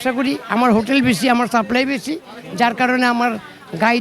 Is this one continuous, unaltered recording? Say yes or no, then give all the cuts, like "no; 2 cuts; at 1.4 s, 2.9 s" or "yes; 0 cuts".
yes; 0 cuts